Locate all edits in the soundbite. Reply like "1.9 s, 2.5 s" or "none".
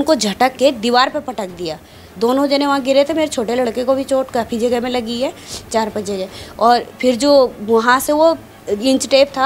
none

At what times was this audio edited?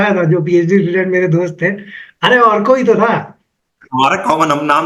none

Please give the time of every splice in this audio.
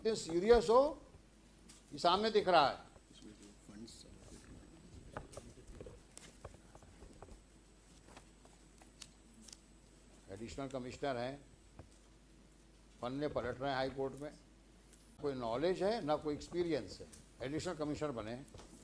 15.2 s

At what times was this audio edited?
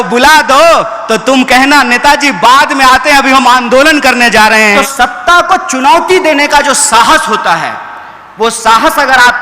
4.6 s

